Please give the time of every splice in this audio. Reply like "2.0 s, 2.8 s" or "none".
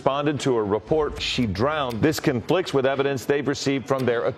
none